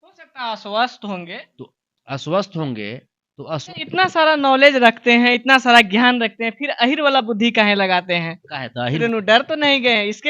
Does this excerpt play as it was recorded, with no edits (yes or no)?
no